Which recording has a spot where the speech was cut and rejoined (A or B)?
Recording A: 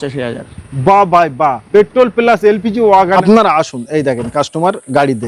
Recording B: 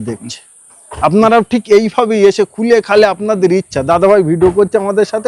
A